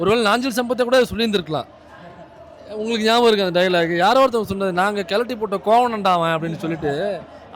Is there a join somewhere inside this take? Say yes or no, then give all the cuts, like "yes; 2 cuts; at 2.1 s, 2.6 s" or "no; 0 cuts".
no; 0 cuts